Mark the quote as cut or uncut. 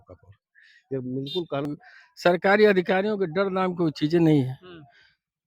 cut